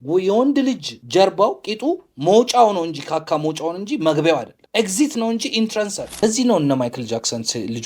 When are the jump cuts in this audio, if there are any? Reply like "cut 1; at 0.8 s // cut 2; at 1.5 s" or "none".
cut 1; at 0.9 s // cut 2; at 4.6 s // cut 3; at 6.2 s